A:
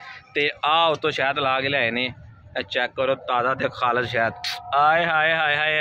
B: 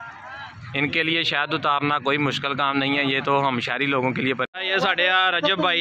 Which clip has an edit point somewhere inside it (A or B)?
B